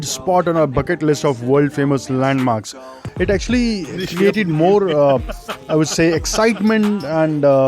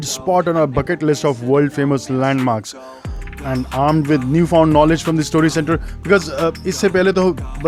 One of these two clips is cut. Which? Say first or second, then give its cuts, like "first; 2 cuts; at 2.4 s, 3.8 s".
first; 1 cut; at 3.0 s